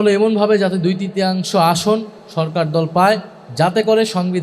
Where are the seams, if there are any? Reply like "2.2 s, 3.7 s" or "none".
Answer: 2.2 s, 3.4 s